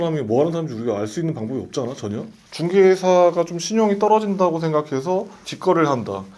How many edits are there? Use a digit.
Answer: 0